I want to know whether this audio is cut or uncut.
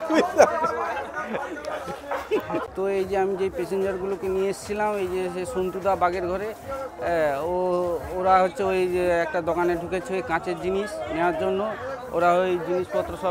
uncut